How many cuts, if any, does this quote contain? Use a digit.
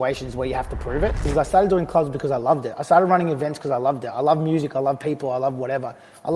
1